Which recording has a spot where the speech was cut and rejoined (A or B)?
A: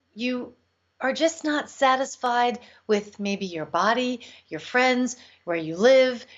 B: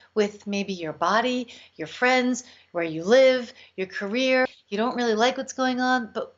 B